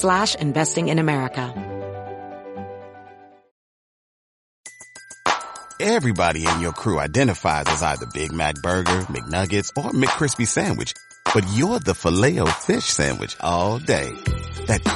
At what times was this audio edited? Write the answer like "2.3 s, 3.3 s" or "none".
1.5 s